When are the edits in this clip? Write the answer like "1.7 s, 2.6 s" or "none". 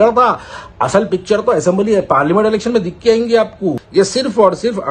3.8 s